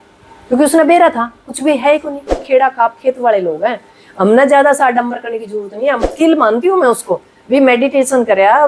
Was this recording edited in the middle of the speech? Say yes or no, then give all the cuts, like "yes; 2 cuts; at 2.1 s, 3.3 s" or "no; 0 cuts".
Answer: yes; 2 cuts; at 2.3 s, 6.0 s